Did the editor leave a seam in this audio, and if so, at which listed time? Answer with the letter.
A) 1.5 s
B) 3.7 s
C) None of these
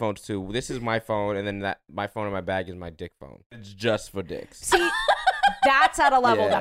B